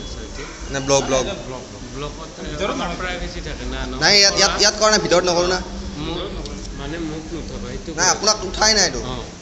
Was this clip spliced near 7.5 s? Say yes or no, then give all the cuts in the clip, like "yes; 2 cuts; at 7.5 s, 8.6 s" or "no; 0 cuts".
no; 0 cuts